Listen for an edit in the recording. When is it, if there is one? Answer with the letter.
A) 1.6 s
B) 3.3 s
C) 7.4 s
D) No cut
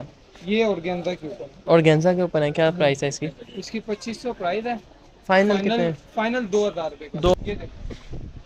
C